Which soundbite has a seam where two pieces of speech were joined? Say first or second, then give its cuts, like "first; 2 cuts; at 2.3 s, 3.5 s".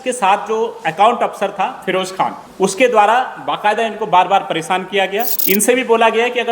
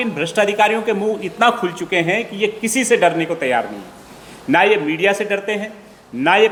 first; 2 cuts; at 2.4 s, 5.3 s